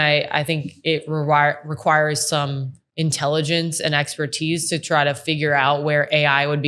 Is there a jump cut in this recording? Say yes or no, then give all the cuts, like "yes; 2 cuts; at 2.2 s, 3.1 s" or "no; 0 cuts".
no; 0 cuts